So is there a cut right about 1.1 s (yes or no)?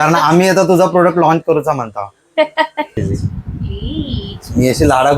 no